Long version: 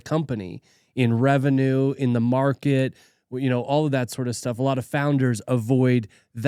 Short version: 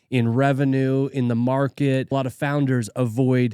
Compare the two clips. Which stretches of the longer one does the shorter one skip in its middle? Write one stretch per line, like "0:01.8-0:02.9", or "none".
0:02.9-0:04.6